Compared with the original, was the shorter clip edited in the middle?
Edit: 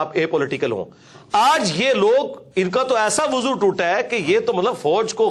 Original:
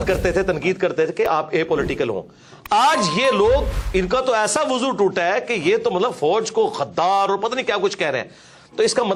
no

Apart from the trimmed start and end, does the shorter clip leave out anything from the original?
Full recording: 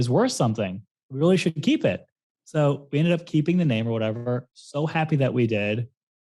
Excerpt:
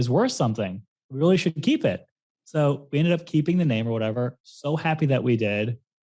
yes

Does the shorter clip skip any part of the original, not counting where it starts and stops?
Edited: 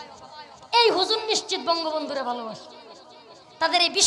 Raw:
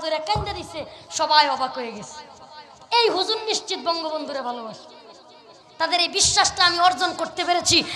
no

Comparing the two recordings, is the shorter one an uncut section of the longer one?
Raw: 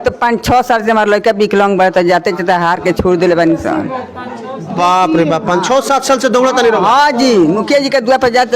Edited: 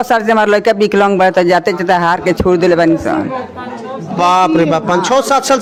yes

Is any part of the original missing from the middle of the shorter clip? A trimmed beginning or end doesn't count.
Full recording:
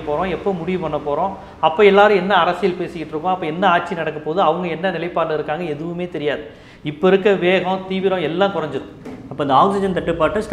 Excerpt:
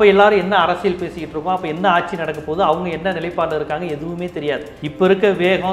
yes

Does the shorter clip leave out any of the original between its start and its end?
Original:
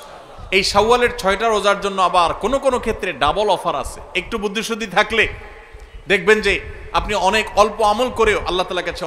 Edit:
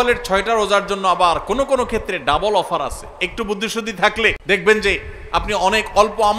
yes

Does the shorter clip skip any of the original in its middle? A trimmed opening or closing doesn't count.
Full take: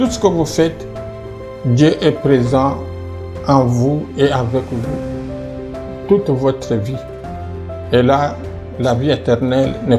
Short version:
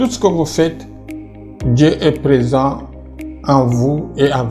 no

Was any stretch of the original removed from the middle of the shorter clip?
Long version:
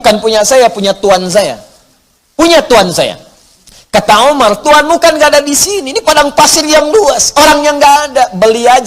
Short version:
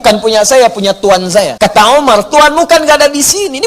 yes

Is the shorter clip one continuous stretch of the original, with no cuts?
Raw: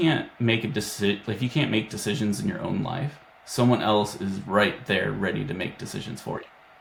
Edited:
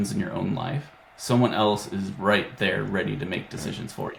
yes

